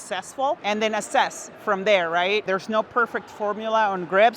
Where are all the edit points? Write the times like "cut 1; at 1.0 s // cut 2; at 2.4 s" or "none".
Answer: cut 1; at 2.5 s